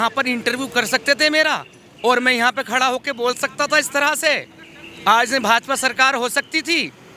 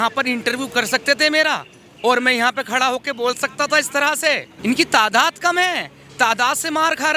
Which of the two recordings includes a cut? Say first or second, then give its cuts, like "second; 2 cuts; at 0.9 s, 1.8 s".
second; 1 cut; at 4.5 s